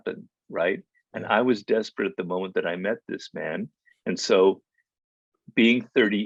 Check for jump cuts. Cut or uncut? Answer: uncut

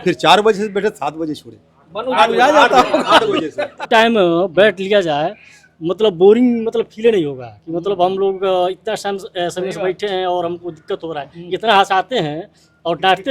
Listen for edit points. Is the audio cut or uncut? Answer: cut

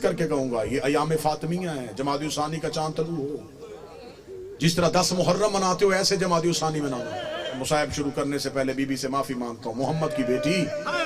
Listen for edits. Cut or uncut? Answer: cut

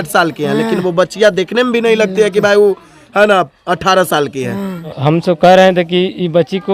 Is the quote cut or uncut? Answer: cut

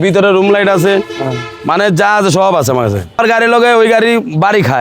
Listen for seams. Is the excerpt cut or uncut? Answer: cut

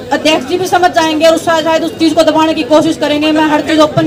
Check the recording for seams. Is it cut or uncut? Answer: uncut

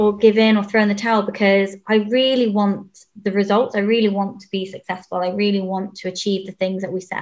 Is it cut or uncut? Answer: uncut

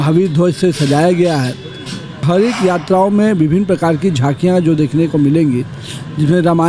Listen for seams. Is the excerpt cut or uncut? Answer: cut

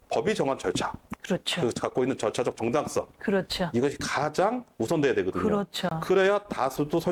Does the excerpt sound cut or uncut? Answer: uncut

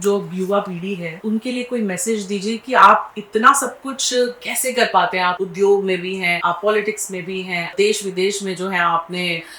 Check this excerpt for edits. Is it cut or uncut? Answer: cut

